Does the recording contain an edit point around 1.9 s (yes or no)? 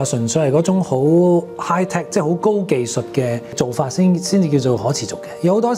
no